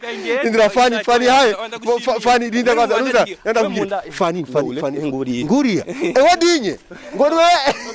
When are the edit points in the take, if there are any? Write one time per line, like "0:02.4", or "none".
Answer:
none